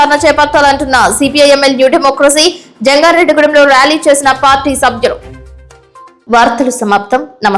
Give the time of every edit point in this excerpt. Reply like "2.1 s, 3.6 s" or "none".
none